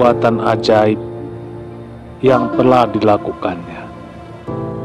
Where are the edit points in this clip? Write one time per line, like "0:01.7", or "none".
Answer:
none